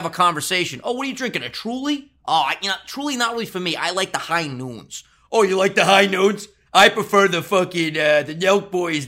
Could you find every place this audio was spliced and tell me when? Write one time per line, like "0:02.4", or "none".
none

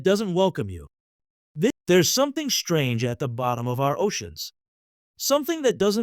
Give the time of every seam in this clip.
0:01.7

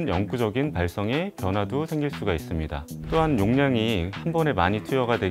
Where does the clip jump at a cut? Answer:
0:02.8

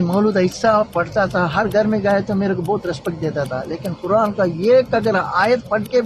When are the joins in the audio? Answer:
none

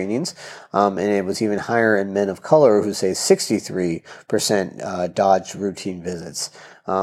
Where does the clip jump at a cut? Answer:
none

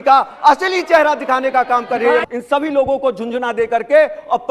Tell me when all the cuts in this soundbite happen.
0:02.2

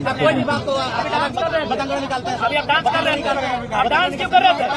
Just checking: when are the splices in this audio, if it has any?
none

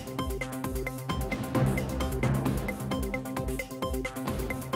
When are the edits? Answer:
0:02.9

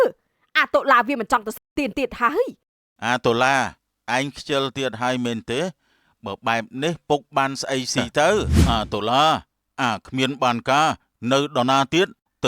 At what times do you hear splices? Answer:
0:08.6

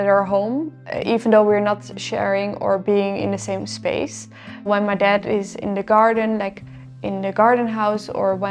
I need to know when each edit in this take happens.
0:04.7

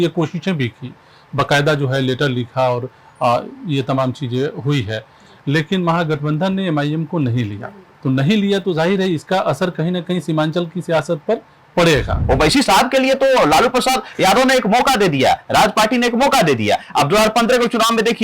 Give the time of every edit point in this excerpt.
0:12.2

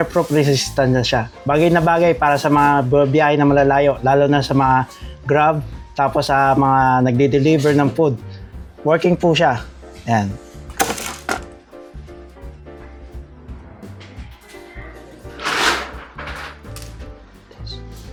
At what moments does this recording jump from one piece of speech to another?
none

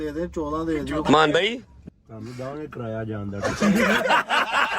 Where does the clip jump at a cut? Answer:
0:01.8
0:03.6

